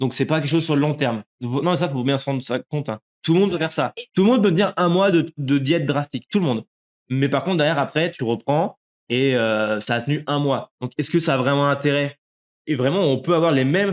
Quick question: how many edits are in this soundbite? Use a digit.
1